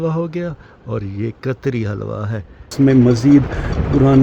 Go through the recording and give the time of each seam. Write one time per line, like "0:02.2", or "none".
0:02.7